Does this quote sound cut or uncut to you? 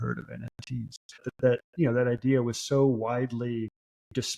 cut